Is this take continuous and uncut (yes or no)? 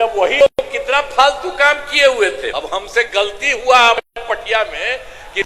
no